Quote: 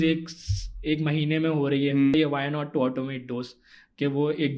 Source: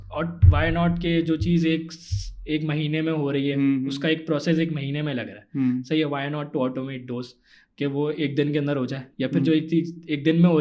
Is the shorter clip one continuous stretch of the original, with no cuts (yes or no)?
no